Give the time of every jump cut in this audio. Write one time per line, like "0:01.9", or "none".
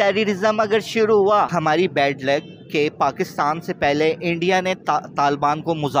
0:01.5